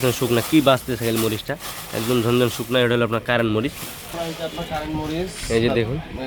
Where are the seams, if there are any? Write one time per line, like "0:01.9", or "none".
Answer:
0:04.0